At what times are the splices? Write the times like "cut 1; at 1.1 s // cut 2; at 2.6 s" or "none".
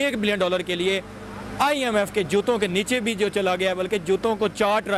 none

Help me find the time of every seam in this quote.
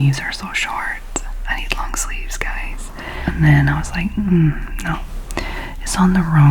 cut 1; at 3.1 s

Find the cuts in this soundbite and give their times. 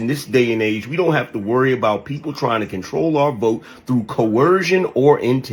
none

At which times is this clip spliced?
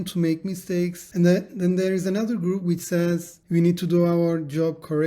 cut 1; at 1.0 s // cut 2; at 3.3 s

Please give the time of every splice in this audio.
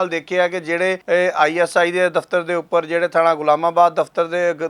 cut 1; at 1.0 s

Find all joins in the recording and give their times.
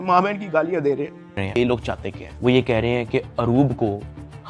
cut 1; at 1.4 s

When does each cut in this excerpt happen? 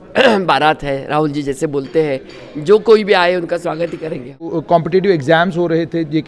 cut 1; at 4.5 s

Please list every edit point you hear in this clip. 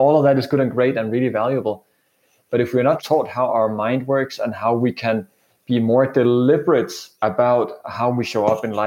cut 1; at 3.0 s // cut 2; at 7.0 s

